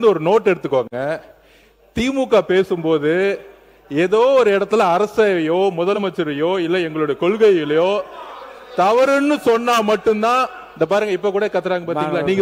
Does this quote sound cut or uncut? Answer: uncut